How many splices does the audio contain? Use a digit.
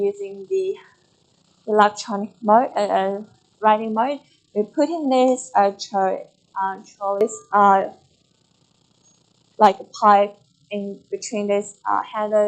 1